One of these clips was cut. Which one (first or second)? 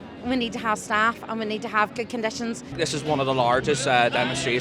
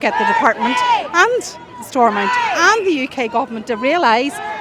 first